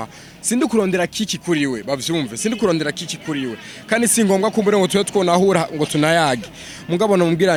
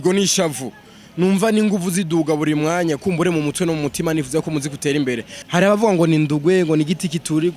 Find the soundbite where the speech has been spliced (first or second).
second